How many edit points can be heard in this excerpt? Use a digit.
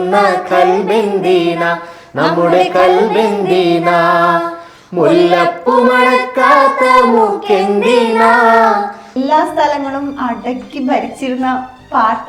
1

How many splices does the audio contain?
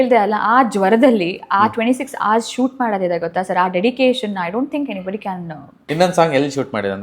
1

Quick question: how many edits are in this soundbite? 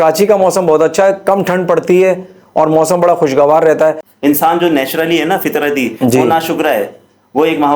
1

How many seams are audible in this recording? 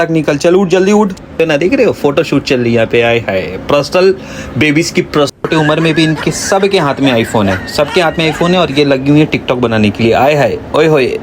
2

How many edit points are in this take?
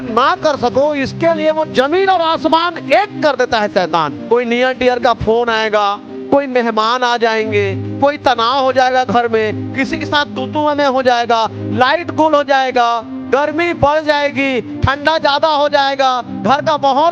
1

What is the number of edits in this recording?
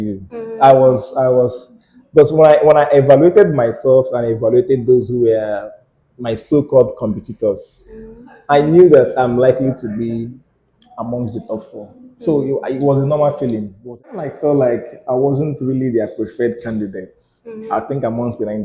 1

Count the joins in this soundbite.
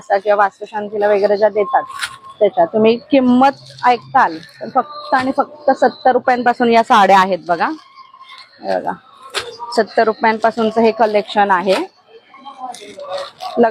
0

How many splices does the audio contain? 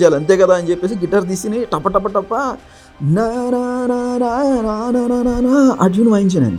0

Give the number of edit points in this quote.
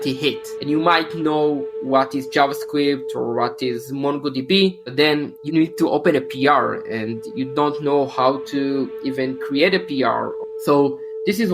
1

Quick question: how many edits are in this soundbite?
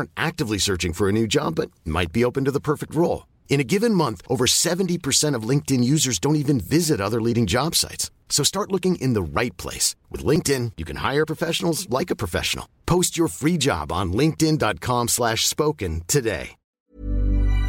1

